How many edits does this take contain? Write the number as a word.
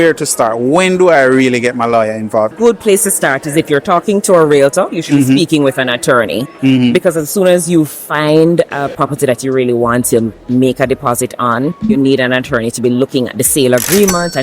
two